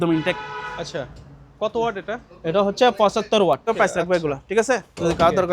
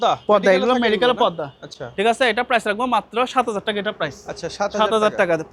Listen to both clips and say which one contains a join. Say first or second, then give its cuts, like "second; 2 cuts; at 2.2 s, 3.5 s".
first; 1 cut; at 3.7 s